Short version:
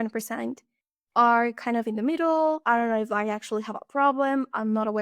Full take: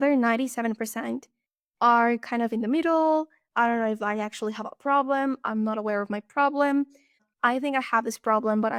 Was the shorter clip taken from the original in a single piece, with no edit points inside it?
no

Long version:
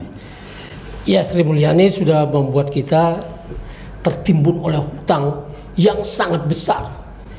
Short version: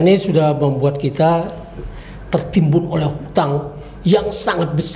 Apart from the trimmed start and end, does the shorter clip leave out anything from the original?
no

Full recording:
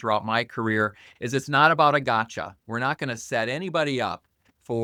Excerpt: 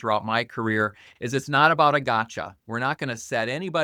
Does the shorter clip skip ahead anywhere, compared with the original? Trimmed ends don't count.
no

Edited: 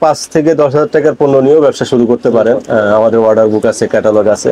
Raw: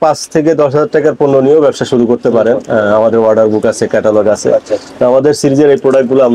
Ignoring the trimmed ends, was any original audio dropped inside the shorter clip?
no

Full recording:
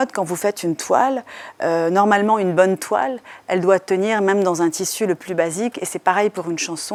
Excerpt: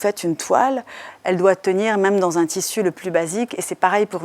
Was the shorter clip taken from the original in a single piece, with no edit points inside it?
no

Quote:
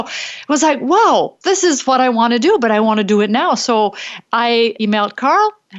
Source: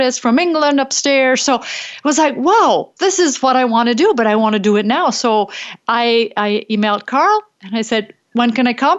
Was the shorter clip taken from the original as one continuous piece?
no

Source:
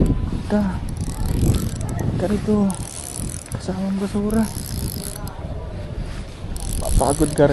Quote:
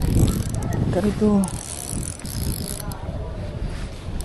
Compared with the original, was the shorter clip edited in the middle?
yes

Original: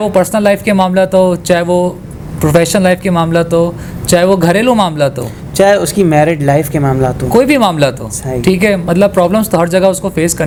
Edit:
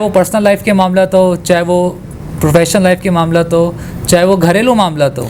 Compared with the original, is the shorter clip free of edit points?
yes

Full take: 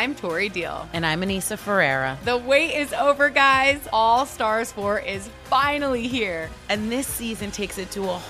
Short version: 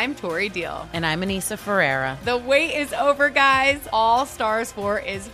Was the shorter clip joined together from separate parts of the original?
no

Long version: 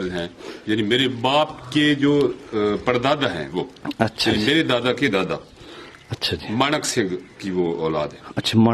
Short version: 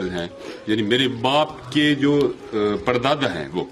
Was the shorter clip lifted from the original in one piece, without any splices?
yes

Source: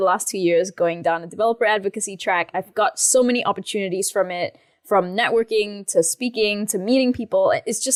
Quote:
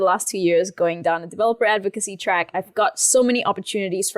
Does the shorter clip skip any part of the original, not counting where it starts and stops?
no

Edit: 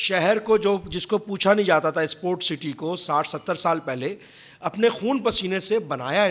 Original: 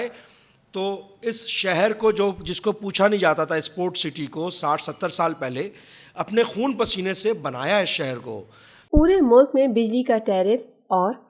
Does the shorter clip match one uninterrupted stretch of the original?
yes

